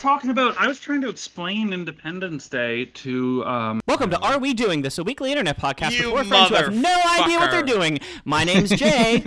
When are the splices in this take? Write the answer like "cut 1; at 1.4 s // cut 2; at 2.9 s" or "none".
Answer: cut 1; at 3.8 s